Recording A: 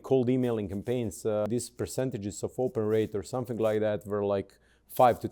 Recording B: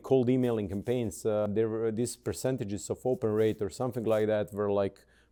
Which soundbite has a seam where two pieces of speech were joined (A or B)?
A